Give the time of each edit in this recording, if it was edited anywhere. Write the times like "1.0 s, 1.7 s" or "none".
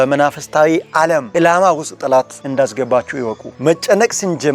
1.3 s, 2.4 s